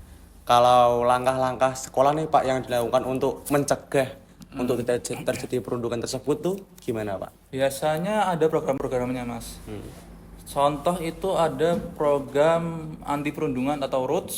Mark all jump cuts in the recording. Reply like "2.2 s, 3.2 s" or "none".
none